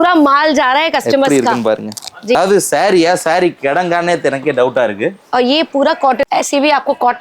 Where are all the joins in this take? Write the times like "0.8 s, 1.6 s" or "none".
2.4 s, 6.2 s